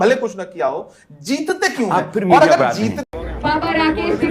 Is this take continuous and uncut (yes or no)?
no